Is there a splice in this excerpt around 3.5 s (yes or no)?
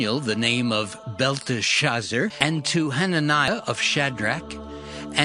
yes